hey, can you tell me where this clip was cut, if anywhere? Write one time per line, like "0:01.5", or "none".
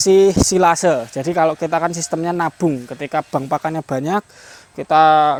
none